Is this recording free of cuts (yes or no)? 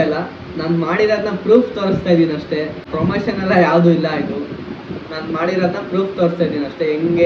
yes